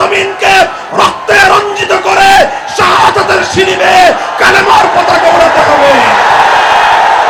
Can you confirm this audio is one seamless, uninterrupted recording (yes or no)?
yes